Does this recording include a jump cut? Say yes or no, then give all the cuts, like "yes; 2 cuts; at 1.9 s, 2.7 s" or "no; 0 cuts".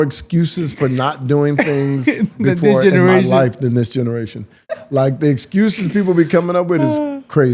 no; 0 cuts